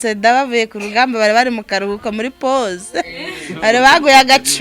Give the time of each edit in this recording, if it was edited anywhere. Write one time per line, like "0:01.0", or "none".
none